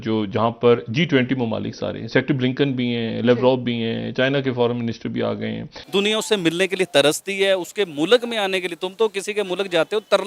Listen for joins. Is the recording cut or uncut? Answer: cut